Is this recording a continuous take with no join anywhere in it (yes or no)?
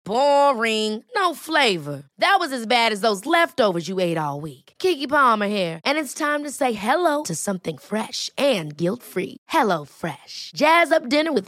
yes